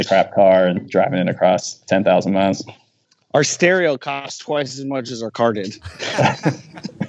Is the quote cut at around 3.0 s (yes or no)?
yes